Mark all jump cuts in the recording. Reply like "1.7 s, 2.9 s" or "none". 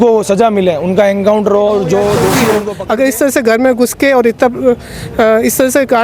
2.7 s